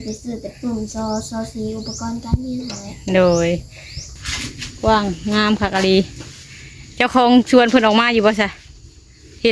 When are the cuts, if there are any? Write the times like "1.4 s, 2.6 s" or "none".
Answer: 4.1 s

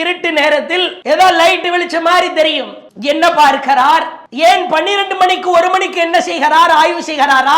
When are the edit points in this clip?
0.9 s

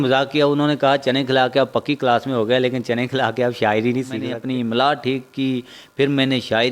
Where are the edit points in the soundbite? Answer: 4.4 s

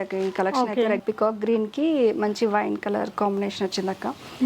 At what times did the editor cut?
1.0 s

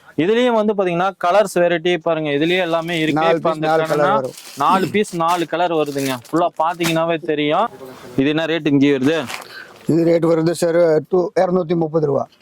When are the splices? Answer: 7.7 s

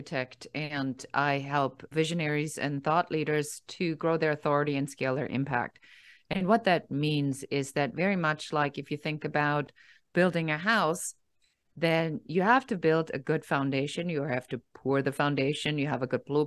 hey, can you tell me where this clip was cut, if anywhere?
1.9 s

